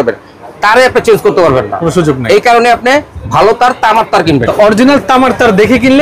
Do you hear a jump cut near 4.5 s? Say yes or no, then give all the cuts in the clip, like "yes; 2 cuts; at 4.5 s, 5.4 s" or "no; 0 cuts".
yes; 1 cut; at 4.5 s